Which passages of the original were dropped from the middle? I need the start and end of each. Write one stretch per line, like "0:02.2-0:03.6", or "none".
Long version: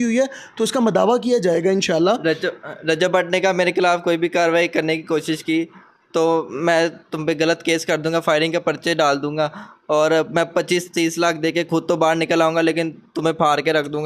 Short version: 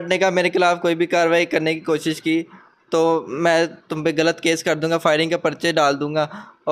none